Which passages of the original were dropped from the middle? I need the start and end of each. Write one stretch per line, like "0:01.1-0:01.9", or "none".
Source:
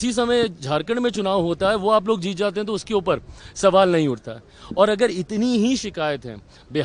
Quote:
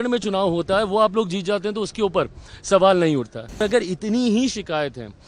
0:04.5-0:04.9